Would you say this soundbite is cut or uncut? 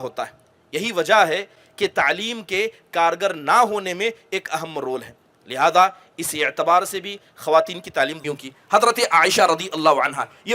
cut